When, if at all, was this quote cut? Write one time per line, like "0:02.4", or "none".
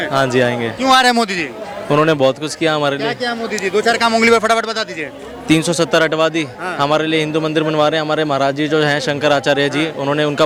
none